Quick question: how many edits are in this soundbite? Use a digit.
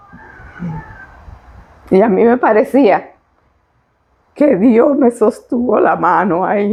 0